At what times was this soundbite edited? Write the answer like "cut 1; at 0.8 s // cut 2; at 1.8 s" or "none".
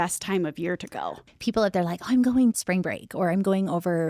cut 1; at 1.2 s // cut 2; at 2.5 s